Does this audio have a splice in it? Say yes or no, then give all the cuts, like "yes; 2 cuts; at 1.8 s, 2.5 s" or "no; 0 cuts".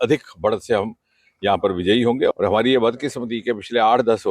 yes; 1 cut; at 2.3 s